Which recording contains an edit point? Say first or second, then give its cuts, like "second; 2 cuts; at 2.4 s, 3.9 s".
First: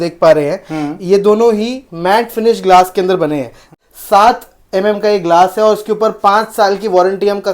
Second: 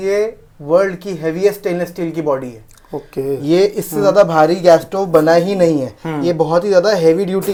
first; 1 cut; at 3.8 s